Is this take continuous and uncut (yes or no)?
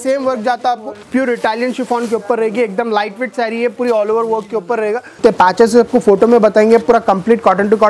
no